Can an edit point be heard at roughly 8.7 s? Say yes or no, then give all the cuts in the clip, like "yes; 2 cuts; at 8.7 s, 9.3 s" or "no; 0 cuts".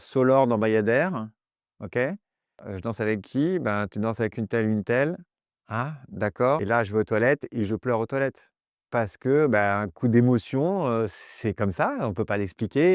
no; 2 cuts; at 2.7 s, 6.6 s